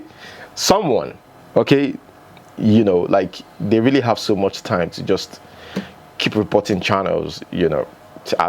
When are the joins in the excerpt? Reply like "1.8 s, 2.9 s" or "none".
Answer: none